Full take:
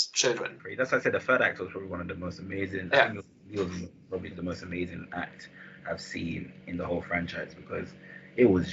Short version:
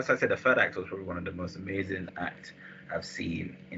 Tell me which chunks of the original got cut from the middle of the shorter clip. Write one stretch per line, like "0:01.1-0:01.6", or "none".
0:02.9-0:05.0